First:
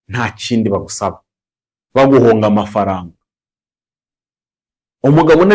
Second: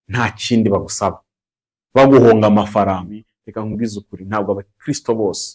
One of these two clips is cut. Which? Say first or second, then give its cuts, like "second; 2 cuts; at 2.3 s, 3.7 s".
second; 1 cut; at 3.4 s